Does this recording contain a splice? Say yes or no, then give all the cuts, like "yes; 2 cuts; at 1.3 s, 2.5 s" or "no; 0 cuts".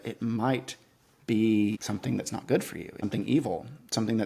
yes; 2 cuts; at 1.8 s, 3.0 s